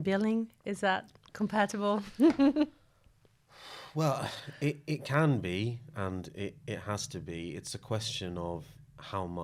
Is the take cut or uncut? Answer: uncut